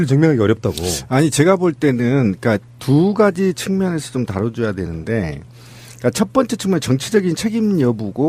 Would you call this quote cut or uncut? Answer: cut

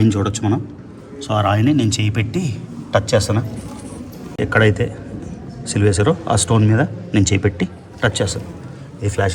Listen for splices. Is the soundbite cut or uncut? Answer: cut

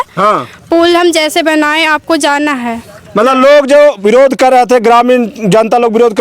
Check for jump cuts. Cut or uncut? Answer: uncut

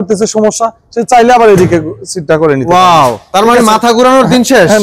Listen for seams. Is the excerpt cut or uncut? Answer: uncut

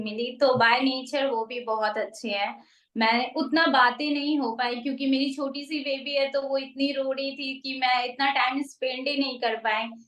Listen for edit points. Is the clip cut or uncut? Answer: uncut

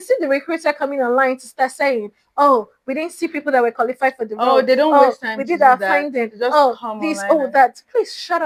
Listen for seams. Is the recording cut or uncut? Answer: uncut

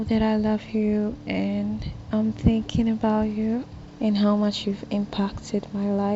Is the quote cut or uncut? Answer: uncut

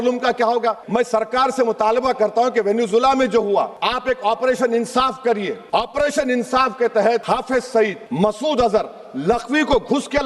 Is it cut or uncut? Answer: cut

